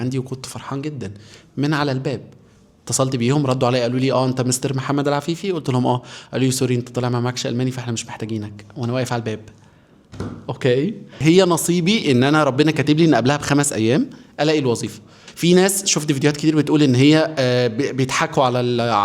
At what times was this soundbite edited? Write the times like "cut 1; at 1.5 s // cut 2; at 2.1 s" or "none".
cut 1; at 11.2 s // cut 2; at 15.2 s